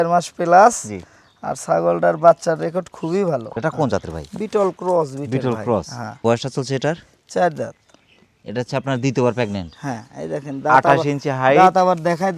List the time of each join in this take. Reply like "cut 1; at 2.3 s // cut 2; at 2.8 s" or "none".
none